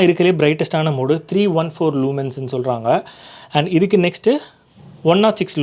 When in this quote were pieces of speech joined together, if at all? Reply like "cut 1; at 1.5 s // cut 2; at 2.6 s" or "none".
none